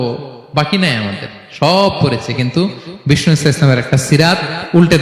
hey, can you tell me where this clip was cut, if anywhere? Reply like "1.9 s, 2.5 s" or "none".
none